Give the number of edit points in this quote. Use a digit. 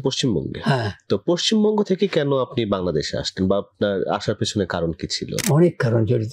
0